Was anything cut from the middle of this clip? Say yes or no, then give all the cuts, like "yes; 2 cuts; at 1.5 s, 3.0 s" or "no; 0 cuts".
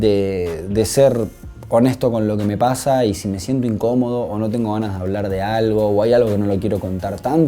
no; 0 cuts